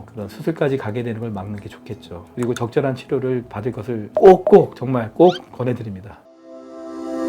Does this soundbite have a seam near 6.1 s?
yes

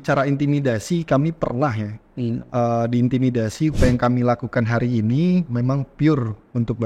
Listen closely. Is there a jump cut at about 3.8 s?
yes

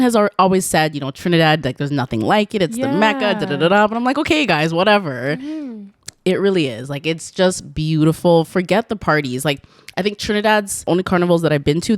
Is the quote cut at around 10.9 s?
yes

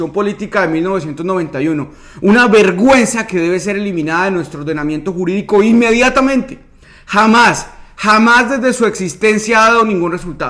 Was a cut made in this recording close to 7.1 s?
no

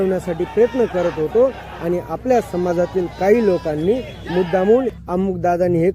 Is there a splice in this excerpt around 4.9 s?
yes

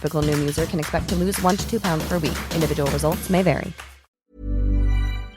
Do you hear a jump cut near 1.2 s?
no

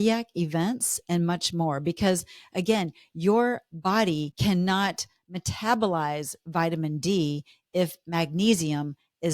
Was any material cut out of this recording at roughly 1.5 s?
no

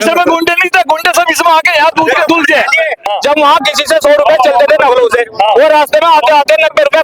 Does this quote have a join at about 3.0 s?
yes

